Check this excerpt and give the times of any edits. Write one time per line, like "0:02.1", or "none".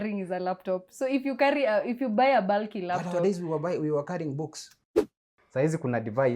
0:04.8